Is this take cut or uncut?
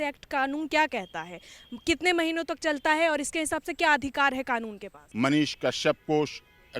cut